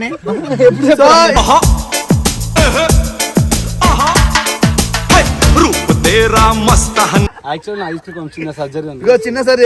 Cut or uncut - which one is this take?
cut